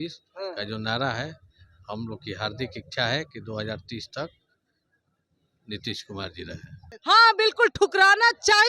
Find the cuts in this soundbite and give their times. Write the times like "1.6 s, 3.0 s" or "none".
6.9 s